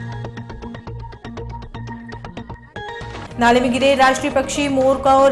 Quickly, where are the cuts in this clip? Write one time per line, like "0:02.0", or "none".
none